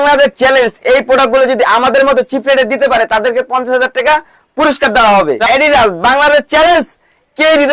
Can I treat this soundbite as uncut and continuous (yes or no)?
no